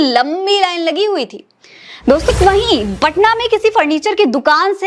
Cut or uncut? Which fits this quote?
cut